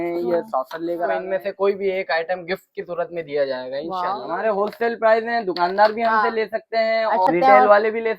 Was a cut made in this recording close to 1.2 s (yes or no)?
yes